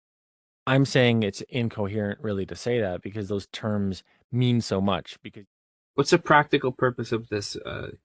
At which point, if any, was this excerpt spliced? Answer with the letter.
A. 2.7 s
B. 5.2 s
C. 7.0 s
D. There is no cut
B